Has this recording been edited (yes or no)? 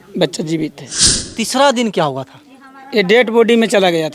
yes